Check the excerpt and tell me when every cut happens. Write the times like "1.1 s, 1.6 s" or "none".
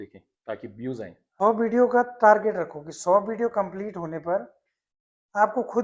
1.2 s